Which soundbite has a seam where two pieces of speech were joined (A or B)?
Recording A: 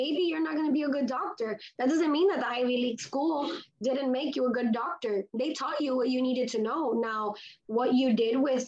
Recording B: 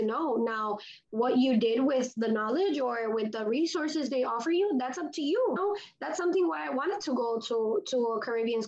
B